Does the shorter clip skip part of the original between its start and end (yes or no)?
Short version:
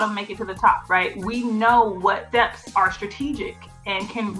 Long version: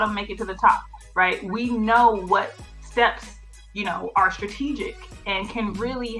yes